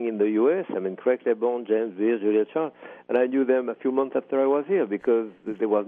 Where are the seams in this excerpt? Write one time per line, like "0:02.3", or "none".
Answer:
none

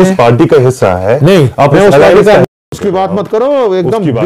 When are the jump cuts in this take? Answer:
0:02.4

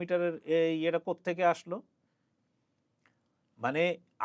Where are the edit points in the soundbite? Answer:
none

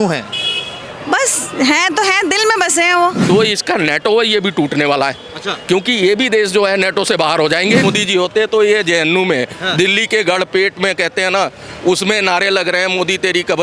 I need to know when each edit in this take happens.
0:03.2
0:07.9

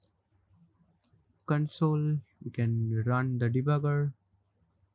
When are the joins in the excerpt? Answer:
0:01.2

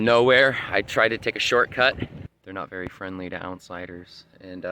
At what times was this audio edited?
0:02.3

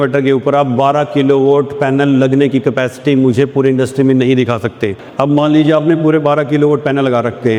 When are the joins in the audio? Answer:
none

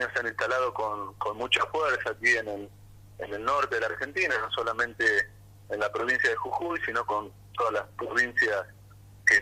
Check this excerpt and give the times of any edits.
none

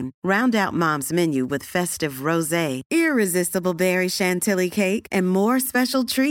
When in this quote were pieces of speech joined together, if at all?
none

